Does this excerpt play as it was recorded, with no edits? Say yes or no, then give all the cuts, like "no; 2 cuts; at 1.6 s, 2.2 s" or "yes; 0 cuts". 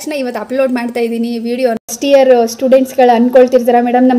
no; 1 cut; at 2.0 s